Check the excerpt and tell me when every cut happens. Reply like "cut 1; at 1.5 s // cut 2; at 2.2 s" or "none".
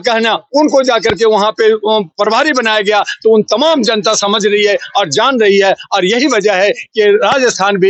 none